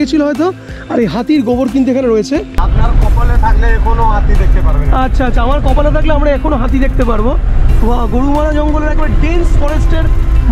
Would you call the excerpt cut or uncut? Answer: cut